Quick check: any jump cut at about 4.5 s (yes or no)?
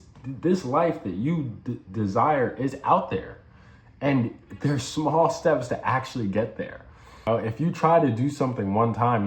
no